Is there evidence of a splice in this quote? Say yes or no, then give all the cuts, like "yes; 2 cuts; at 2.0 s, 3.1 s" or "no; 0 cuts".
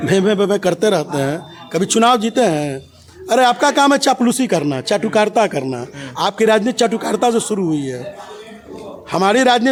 no; 0 cuts